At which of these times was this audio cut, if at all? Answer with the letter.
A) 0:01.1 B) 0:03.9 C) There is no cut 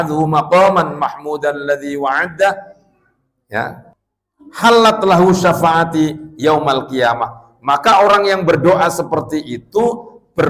B